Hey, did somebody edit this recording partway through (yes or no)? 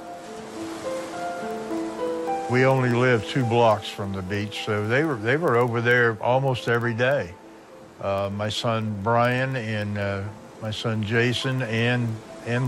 yes